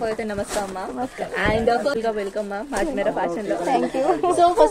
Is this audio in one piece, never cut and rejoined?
no; 1 cut; at 1.8 s

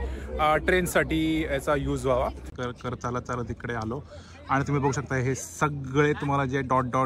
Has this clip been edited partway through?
yes; 1 cut; at 2.5 s

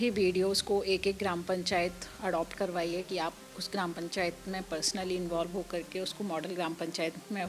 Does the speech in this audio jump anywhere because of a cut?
no; 0 cuts

